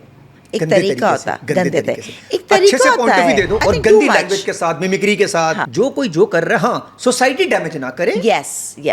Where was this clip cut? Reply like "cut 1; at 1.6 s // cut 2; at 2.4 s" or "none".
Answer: cut 1; at 3.6 s // cut 2; at 5.6 s